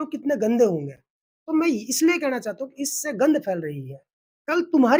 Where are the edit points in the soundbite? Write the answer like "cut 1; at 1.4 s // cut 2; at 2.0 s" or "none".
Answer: none